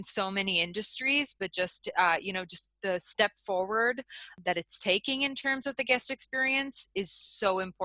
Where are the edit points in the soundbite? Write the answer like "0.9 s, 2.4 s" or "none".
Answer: 4.3 s